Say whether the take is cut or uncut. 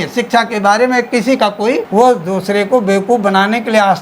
cut